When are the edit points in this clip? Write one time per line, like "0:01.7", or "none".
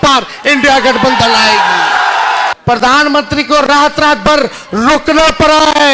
0:02.5